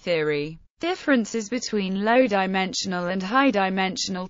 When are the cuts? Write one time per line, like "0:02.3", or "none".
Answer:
none